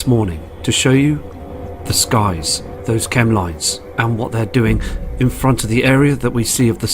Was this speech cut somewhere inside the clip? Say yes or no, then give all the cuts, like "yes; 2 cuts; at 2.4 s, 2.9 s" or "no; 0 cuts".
yes; 1 cut; at 3.6 s